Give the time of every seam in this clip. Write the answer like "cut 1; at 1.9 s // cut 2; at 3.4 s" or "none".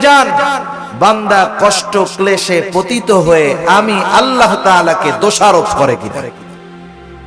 cut 1; at 6.3 s